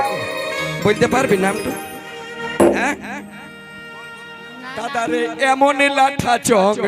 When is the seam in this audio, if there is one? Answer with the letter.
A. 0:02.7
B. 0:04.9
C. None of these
B